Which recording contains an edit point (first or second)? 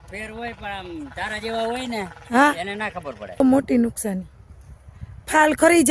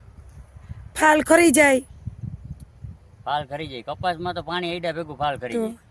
first